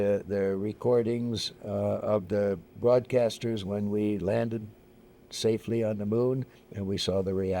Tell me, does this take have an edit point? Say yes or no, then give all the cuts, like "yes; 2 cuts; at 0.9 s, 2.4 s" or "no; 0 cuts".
no; 0 cuts